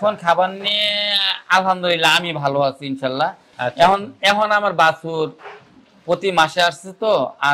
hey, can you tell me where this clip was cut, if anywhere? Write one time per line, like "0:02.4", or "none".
0:03.5